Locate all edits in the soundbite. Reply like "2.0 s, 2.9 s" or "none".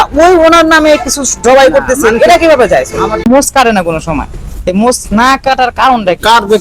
3.3 s

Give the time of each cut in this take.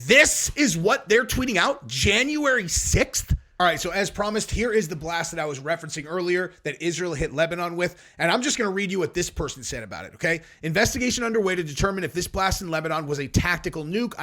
3.5 s

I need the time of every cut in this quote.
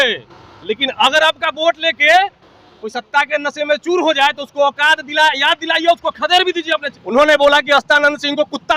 6.9 s

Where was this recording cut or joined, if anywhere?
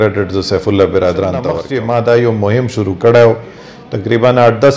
1.6 s

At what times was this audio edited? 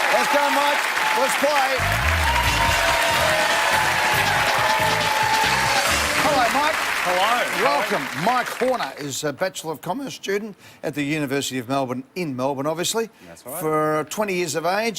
2.3 s

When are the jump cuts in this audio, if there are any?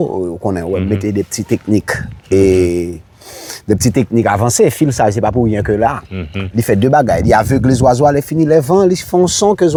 none

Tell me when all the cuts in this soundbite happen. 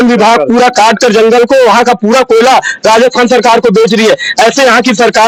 none

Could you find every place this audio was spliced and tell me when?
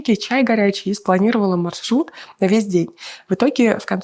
none

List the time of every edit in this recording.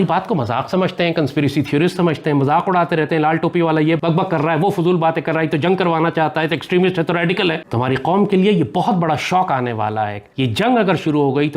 4.0 s, 7.6 s

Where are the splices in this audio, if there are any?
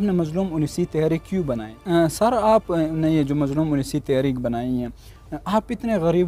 1.7 s

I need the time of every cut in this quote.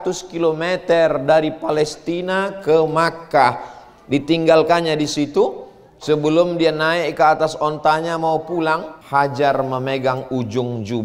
8.9 s

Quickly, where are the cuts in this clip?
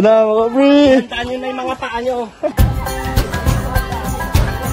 2.5 s

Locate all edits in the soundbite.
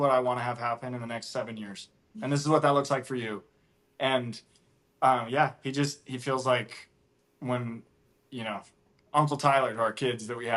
none

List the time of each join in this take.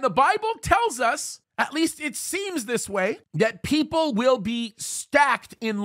3.2 s

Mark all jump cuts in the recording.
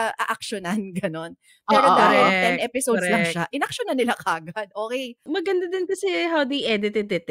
5.2 s

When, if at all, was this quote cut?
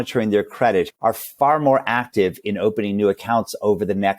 0.9 s

